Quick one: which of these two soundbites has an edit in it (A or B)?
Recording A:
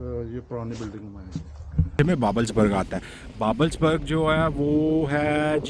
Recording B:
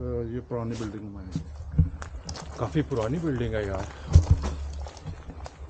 A